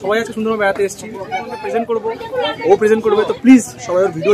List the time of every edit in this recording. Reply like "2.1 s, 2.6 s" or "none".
1.6 s